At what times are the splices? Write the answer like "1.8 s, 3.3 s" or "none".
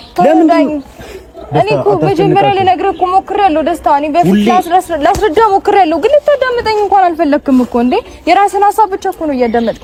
none